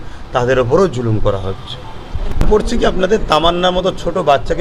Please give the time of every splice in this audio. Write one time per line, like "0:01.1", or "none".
0:02.5